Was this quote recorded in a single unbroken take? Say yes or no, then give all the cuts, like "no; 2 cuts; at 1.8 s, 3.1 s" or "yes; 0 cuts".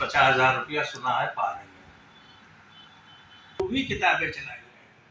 no; 1 cut; at 3.6 s